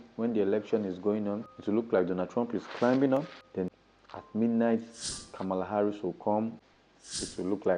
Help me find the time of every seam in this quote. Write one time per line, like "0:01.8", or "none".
none